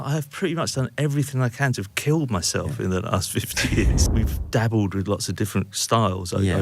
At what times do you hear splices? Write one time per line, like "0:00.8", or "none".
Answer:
0:04.1